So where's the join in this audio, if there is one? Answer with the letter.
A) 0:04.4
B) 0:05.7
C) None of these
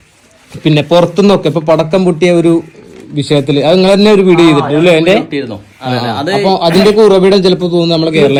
C